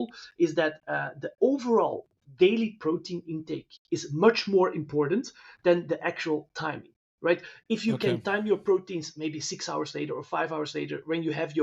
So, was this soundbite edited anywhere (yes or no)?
no